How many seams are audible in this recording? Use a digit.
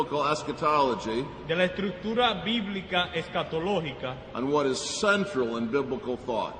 1